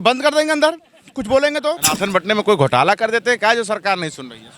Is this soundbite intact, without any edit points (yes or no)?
no